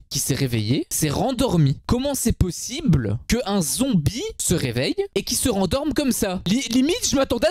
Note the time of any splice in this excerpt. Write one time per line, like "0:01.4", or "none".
none